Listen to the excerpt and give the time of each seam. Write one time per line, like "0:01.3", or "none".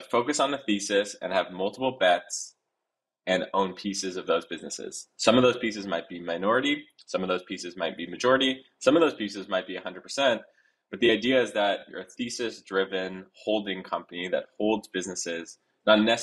0:12.0